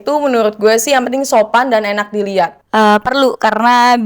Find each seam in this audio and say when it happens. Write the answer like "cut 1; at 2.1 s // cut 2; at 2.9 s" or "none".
cut 1; at 2.6 s